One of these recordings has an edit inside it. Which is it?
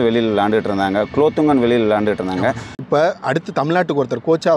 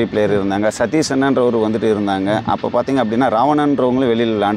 first; 1 cut; at 2.7 s

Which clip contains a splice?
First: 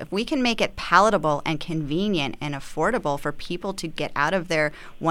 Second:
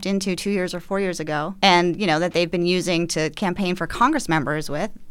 second; 1 cut; at 1.5 s

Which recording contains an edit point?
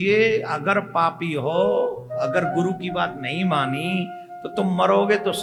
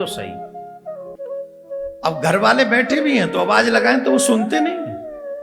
second; 1 cut; at 1.1 s

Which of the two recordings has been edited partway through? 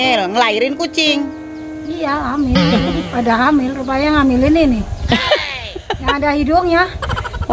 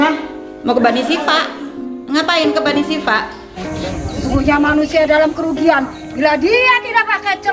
second; 1 cut; at 3.7 s

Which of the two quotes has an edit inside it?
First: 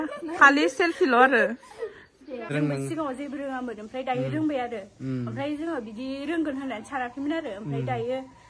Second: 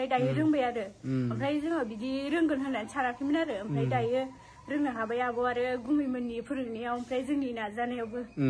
first; 1 cut; at 2.4 s

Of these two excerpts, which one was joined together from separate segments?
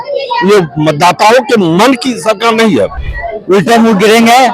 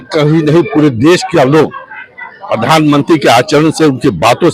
first; 1 cut; at 3.0 s

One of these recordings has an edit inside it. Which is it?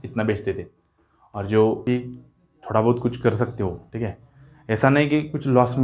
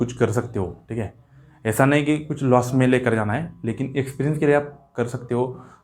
first; 1 cut; at 1.8 s

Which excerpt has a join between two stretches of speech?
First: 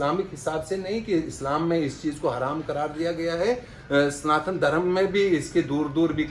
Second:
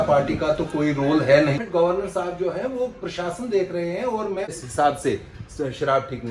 second; 2 cuts; at 1.6 s, 4.6 s

